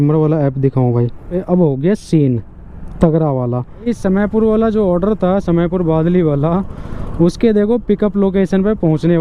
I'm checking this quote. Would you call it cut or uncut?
cut